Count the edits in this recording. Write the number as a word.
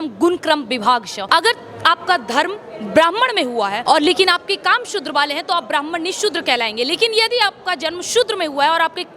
two